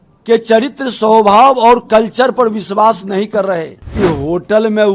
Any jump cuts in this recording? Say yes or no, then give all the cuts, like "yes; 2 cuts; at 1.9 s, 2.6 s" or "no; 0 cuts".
yes; 1 cut; at 3.9 s